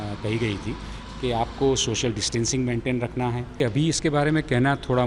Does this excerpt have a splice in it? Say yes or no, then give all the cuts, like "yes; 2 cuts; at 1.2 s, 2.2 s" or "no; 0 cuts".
yes; 1 cut; at 3.6 s